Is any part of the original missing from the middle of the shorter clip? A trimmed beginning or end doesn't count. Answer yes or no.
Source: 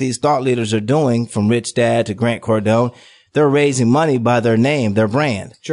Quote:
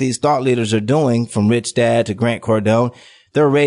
no